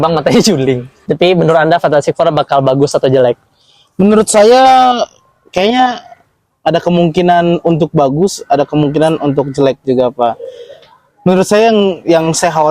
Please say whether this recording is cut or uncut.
cut